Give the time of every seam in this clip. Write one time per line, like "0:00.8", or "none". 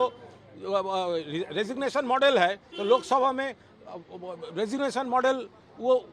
none